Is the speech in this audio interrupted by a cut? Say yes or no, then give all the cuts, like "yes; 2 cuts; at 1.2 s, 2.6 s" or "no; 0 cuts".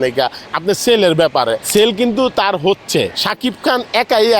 yes; 2 cuts; at 1.6 s, 3.2 s